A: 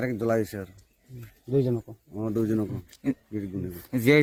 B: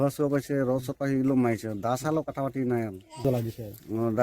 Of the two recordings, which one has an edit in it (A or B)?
B